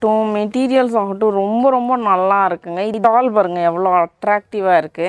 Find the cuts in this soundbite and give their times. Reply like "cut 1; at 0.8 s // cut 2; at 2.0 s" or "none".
cut 1; at 3.0 s